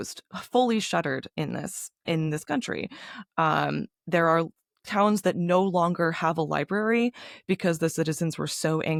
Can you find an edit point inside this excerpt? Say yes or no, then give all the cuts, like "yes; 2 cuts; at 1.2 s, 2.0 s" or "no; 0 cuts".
no; 0 cuts